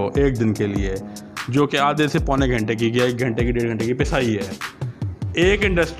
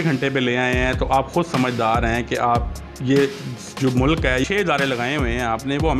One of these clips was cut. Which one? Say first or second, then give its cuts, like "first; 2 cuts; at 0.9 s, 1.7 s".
second; 1 cut; at 4.4 s